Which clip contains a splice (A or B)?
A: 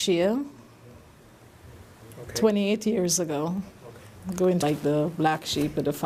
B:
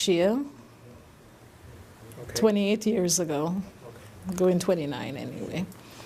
B